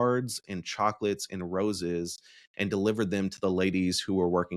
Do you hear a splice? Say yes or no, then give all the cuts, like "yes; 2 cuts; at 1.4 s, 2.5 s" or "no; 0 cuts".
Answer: no; 0 cuts